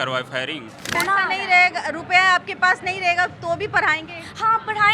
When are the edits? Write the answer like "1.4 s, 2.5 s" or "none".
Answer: 0.9 s

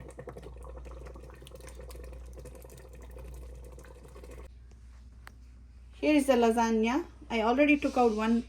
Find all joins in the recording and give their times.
4.5 s

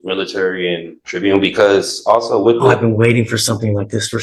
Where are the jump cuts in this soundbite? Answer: 1.0 s

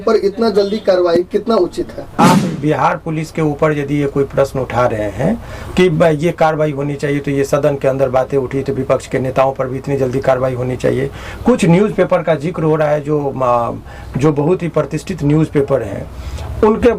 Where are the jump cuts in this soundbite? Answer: 2.2 s

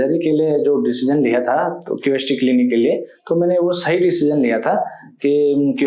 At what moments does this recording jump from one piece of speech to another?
none

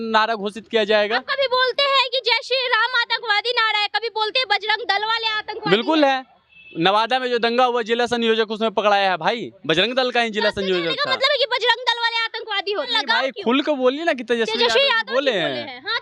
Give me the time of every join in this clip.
12.9 s

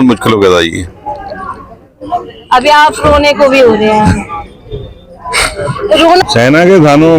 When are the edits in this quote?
6.2 s

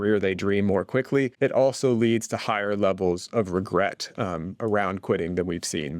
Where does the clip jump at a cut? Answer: 1.3 s

